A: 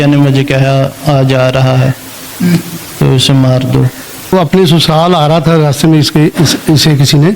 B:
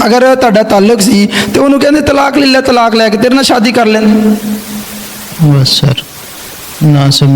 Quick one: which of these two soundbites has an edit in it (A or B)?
A